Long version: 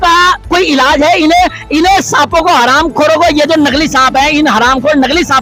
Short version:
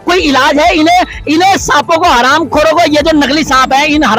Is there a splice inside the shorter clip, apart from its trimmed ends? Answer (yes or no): no